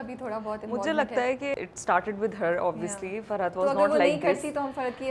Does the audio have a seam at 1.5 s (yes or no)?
yes